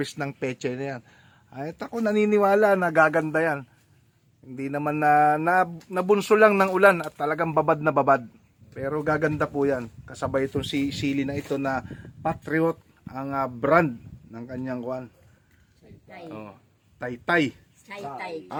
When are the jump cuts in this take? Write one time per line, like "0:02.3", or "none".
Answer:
none